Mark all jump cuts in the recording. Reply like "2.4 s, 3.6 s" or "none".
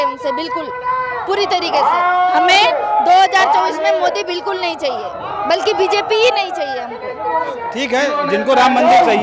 7.7 s